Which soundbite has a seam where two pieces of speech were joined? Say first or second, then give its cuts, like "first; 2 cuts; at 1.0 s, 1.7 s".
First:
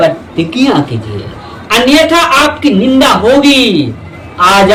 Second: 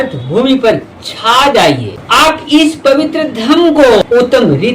second; 2 cuts; at 1.6 s, 4.0 s